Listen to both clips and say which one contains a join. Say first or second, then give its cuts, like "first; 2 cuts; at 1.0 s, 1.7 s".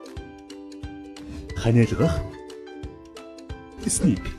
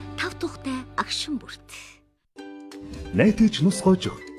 second; 1 cut; at 2.4 s